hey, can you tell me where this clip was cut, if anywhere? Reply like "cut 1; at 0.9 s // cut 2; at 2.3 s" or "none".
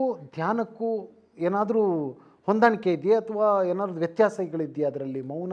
none

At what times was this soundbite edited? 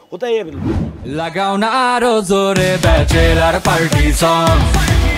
cut 1; at 1.0 s

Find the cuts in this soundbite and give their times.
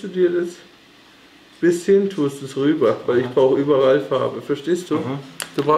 none

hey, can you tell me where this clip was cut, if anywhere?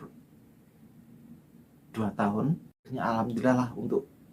cut 1; at 2.9 s

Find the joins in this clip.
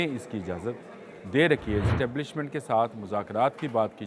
cut 1; at 1.9 s

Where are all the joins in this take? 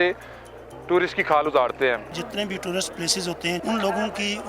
cut 1; at 2.1 s // cut 2; at 3.6 s

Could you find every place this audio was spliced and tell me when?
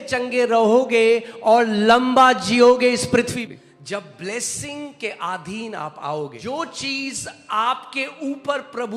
cut 1; at 3.3 s // cut 2; at 6.4 s

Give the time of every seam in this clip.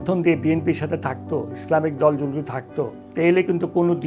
cut 1; at 3.0 s

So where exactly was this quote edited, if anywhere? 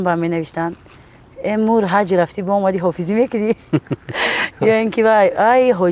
none

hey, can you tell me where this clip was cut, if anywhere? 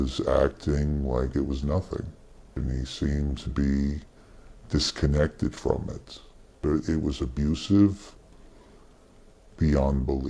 none

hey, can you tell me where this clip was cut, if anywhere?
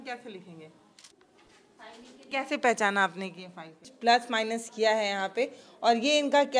cut 1; at 1.1 s // cut 2; at 2.3 s // cut 3; at 3.9 s

